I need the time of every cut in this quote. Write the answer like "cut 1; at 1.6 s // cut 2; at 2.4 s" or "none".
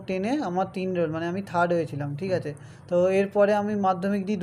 none